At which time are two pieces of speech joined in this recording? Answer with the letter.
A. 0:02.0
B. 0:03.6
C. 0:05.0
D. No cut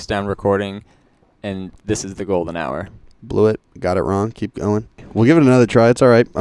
C